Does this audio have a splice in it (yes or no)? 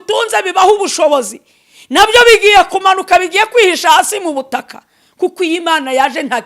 no